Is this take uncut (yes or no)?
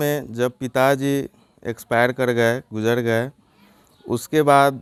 yes